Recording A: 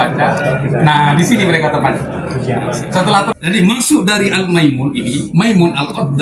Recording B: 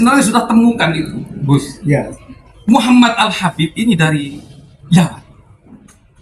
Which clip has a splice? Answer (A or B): A